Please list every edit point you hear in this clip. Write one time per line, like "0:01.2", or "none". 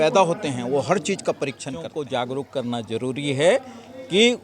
0:01.9

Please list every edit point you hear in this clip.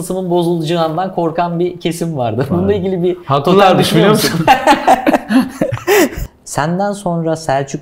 0:06.2

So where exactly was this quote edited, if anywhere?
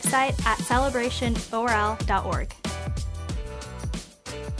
0:02.5

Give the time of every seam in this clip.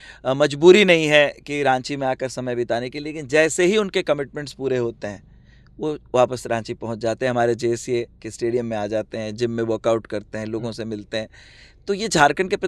none

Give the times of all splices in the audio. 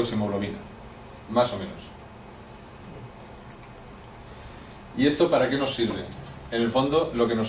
0:04.8

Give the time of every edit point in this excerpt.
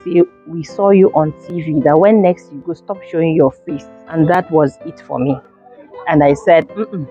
0:04.0

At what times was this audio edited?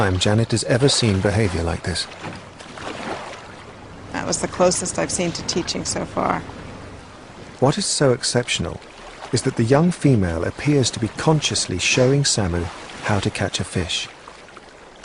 0:03.8

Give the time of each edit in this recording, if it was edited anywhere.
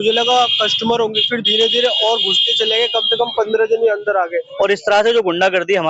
0:04.4

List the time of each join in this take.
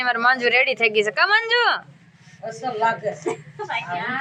none

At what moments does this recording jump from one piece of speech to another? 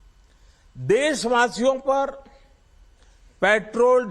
0:01.2

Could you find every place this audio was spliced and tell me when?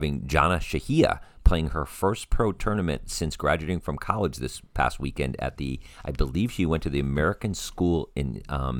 none

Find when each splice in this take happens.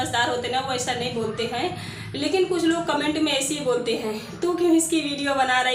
none

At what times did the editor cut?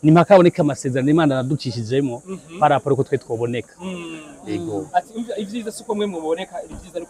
none

